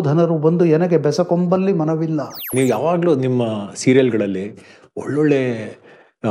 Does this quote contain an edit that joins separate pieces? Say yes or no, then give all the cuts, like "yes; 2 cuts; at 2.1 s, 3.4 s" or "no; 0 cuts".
yes; 1 cut; at 2.5 s